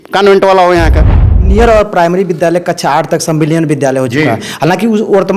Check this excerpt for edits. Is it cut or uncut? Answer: cut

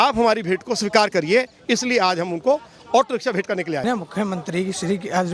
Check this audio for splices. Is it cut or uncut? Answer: cut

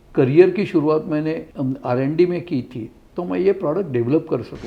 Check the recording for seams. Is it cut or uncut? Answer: cut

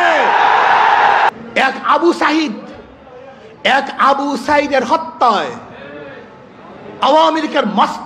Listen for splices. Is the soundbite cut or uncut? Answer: cut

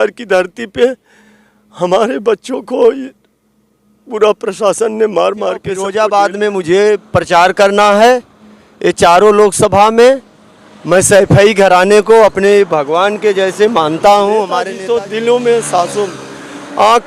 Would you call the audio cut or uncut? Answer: cut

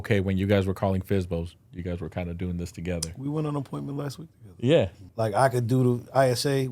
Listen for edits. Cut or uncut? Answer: cut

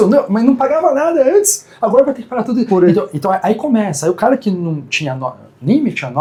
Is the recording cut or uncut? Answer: uncut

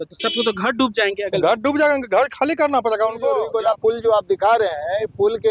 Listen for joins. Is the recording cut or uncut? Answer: cut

